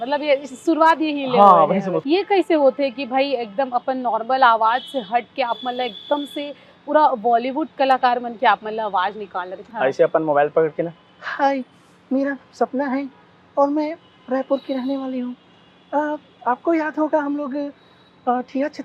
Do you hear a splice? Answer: yes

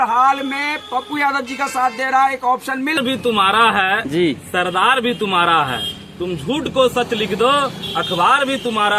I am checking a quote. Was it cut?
yes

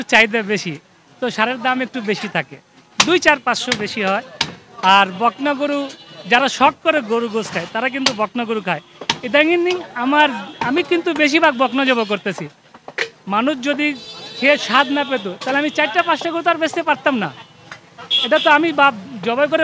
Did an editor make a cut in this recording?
no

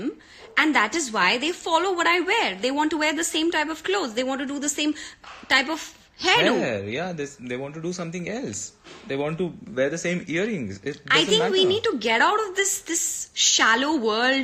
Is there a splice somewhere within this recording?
no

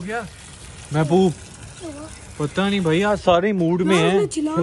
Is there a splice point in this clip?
no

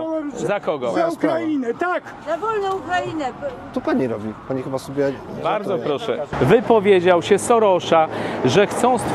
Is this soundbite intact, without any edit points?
no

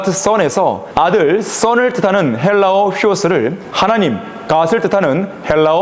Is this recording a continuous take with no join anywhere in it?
no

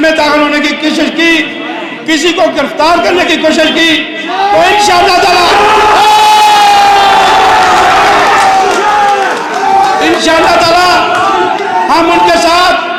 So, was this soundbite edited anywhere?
no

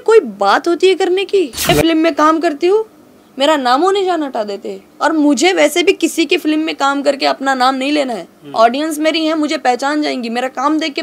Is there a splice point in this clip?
yes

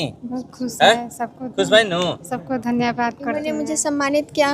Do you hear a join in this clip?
yes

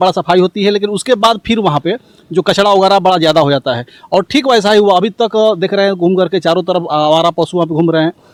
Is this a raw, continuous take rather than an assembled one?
yes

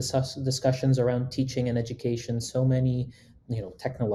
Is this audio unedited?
yes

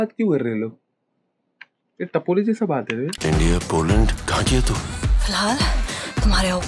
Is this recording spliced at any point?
yes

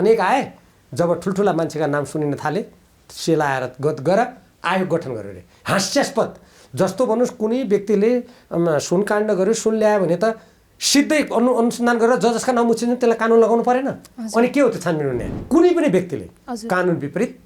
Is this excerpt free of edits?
no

